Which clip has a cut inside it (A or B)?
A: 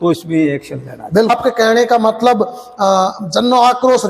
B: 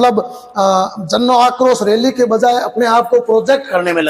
A